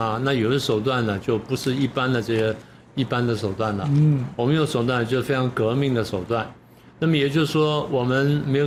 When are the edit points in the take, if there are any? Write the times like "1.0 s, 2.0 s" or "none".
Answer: none